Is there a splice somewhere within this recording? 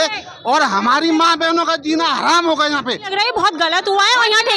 yes; 1 cut; at 3.1 s

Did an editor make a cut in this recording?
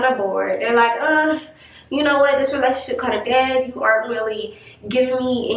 no; 0 cuts

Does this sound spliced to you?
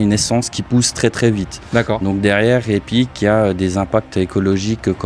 no; 0 cuts

